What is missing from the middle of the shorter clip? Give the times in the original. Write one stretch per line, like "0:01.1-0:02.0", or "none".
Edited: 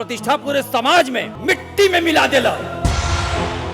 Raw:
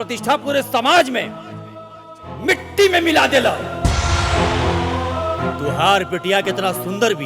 0:01.3-0:02.3